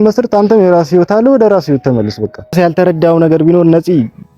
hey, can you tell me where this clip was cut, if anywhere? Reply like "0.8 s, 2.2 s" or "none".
2.5 s